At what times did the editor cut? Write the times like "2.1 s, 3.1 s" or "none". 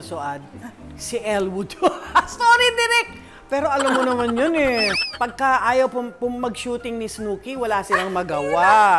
5.0 s